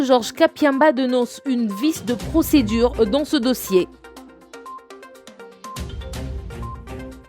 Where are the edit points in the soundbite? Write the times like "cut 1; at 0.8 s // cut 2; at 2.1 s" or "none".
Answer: cut 1; at 3.9 s